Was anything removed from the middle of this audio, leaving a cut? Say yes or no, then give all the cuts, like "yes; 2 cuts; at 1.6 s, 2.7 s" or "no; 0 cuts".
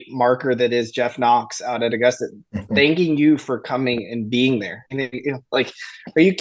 yes; 1 cut; at 4.8 s